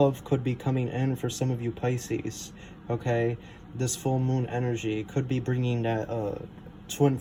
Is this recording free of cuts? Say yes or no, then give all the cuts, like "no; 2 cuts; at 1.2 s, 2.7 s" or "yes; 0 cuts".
yes; 0 cuts